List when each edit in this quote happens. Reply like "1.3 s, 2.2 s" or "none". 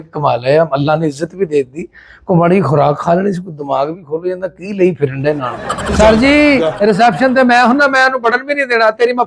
5.8 s